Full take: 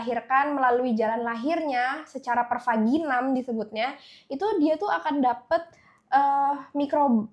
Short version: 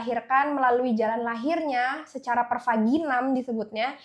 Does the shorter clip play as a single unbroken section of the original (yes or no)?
yes